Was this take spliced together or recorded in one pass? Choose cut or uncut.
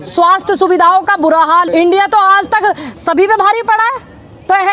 cut